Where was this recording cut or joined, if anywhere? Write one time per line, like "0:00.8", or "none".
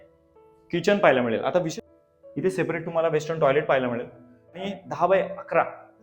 0:01.7
0:04.7